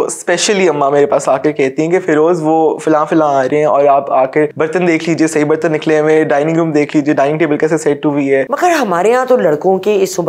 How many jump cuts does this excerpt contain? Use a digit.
2